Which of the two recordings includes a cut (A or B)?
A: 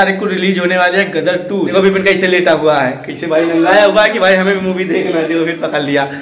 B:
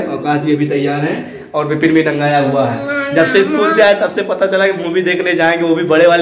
A